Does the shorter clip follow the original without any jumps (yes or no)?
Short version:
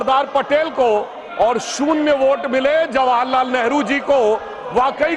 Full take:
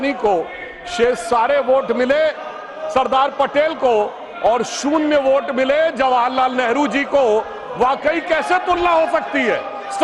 yes